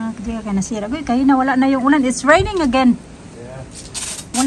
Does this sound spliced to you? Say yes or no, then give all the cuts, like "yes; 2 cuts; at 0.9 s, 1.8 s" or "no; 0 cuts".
no; 0 cuts